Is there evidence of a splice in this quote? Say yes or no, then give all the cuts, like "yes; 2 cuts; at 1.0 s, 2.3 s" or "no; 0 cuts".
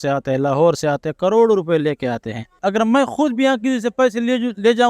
yes; 1 cut; at 2.5 s